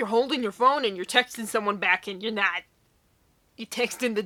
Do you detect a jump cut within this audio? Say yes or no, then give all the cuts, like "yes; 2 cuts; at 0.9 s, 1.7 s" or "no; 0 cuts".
no; 0 cuts